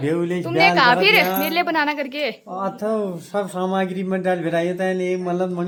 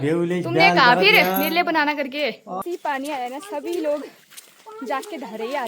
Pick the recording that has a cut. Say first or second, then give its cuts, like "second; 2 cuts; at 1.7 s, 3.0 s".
second; 1 cut; at 2.6 s